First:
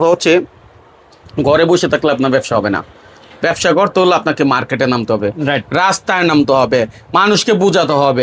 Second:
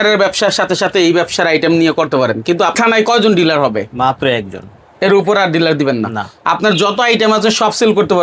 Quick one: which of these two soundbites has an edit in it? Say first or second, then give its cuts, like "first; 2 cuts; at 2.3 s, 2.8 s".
second; 1 cut; at 2.7 s